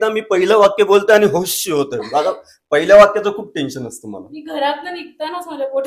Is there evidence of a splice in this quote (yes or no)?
no